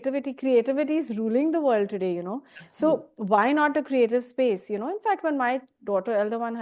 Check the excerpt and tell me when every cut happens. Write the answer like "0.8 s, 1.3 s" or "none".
none